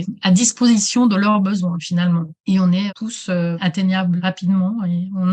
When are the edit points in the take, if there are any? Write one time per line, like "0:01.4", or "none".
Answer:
0:03.3
0:04.2